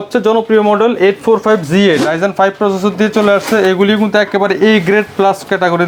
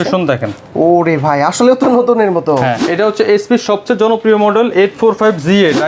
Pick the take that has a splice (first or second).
second